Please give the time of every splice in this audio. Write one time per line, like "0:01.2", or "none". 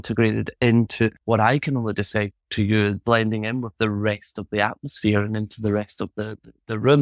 0:01.2